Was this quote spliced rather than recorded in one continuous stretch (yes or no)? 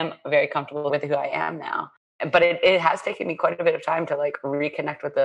yes